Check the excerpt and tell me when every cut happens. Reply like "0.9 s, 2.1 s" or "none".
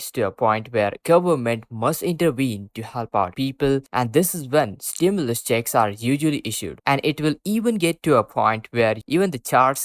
6.8 s

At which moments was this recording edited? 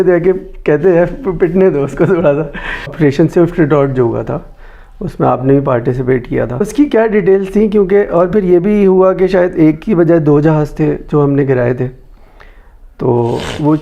2.9 s, 6.7 s

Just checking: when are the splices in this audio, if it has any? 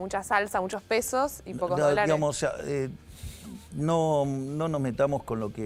none

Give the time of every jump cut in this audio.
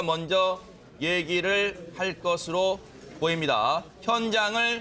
none

